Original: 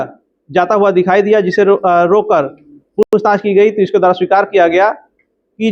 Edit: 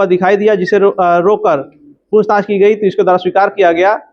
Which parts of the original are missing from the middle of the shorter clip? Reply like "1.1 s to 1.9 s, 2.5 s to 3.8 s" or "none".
3.0 s to 3.1 s

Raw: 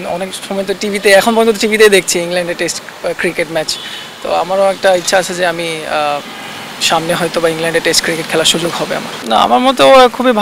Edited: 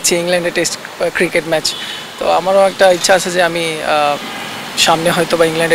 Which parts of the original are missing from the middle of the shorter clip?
none

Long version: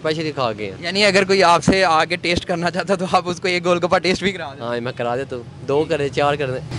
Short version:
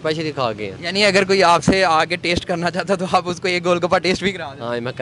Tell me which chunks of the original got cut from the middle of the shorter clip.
none

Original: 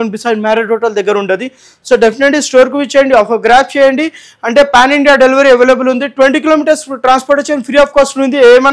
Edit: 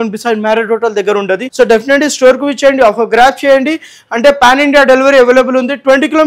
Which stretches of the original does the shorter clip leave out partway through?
1.5 s to 1.8 s

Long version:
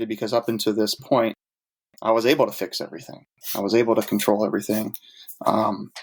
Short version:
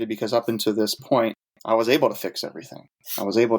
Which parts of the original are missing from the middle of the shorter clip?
1.5 s to 1.9 s

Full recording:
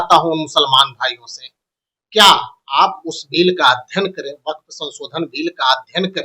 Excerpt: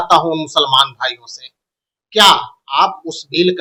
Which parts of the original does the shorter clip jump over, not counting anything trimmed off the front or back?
none

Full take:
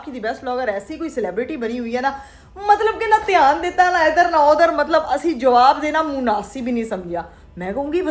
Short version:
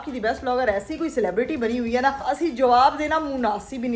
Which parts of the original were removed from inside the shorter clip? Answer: 2.3 s to 5.1 s

